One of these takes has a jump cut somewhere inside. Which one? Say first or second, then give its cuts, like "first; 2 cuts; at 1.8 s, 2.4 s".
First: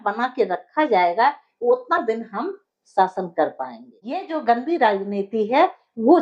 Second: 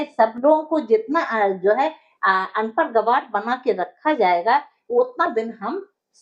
first; 1 cut; at 4.3 s